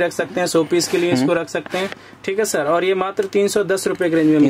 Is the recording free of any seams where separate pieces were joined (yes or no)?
yes